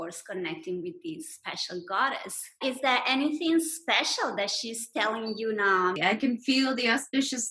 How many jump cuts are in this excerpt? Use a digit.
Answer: 2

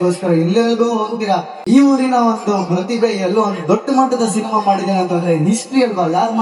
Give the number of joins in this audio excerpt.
1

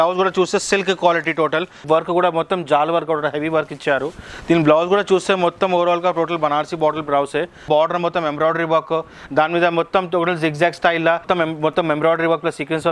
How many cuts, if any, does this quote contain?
3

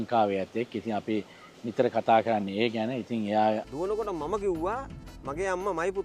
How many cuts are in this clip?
1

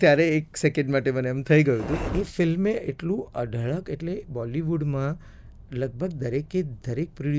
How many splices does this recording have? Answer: 1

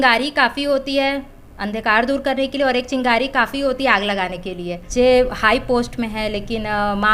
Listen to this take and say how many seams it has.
1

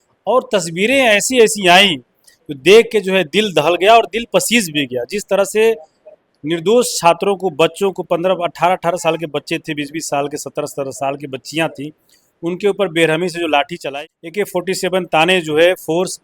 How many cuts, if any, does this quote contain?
1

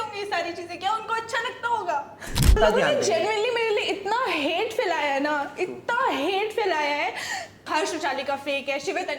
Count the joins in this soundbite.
1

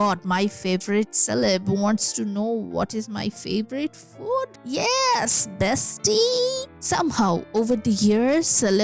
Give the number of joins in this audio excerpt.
0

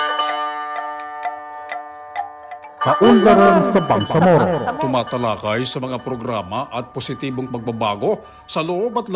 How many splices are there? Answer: 1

